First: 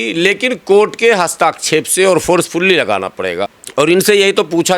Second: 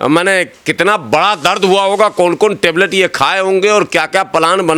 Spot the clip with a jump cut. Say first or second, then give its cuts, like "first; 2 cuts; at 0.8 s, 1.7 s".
first; 1 cut; at 3.6 s